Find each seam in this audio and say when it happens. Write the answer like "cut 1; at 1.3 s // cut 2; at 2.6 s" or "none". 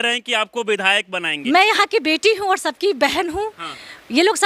cut 1; at 1.3 s